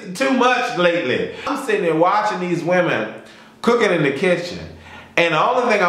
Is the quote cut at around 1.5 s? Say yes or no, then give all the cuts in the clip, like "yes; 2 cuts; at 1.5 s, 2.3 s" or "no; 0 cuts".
yes; 1 cut; at 1.5 s